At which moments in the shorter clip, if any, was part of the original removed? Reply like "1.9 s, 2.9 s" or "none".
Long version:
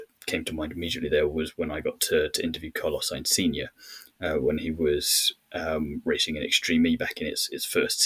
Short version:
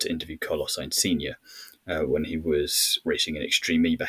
3.0 s